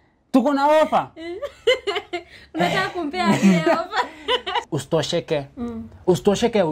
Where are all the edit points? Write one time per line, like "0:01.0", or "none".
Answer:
0:04.5